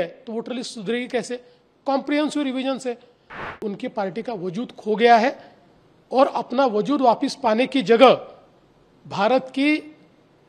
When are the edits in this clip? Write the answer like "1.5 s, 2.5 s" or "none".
3.4 s